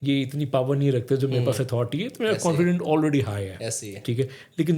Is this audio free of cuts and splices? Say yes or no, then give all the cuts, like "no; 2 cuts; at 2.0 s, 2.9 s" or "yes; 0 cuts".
yes; 0 cuts